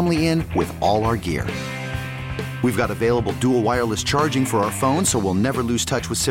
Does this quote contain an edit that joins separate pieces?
no; 0 cuts

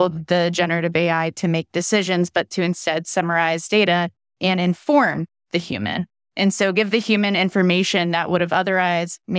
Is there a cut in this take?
no; 0 cuts

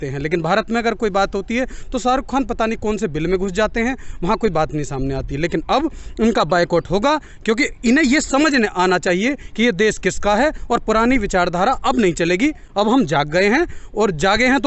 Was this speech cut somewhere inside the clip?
no; 0 cuts

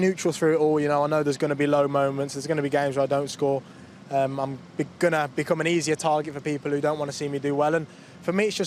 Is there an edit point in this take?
no; 0 cuts

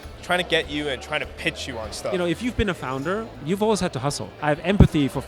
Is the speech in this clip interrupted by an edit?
yes; 3 cuts; at 2.1 s, 3.4 s, 4.3 s

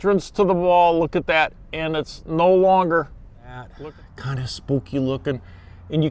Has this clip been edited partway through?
yes; 1 cut; at 3.7 s

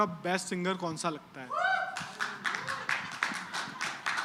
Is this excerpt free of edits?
yes; 0 cuts

